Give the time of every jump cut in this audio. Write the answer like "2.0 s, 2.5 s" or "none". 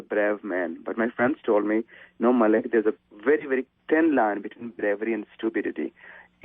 3.7 s